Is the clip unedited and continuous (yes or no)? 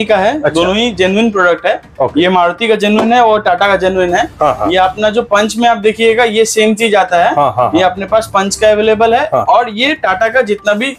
yes